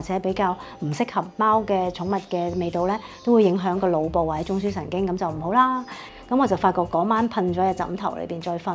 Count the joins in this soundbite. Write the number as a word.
one